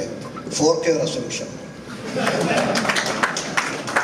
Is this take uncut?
yes; 0 cuts

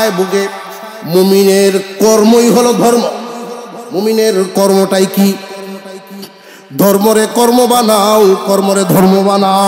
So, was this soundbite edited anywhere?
no; 0 cuts

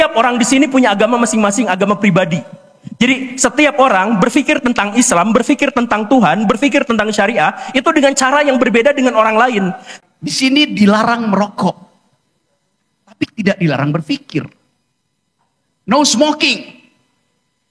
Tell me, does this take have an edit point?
yes; 1 cut; at 9.9 s

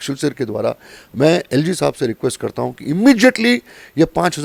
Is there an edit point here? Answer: no; 0 cuts

